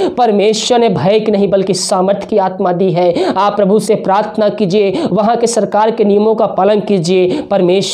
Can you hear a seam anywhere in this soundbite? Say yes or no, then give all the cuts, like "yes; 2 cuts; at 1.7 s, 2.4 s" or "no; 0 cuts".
no; 0 cuts